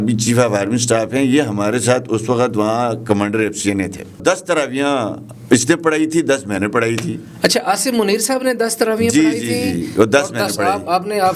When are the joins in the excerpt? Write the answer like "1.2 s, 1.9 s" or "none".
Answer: 4.2 s